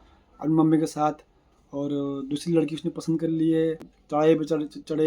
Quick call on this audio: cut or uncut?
cut